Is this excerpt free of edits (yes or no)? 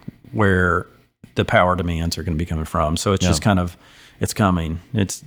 yes